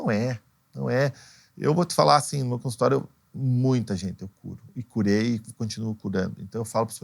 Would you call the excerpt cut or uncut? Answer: uncut